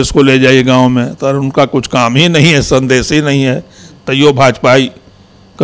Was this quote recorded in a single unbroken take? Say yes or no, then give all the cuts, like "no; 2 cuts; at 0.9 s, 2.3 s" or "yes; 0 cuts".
yes; 0 cuts